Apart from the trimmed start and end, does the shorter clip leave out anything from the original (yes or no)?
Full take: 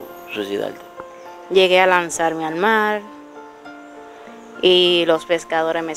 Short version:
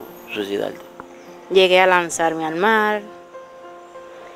no